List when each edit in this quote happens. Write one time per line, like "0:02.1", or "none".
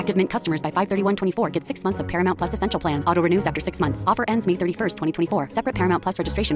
none